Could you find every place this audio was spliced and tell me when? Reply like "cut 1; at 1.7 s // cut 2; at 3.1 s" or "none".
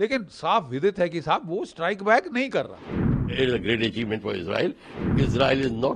cut 1; at 3.3 s // cut 2; at 4.9 s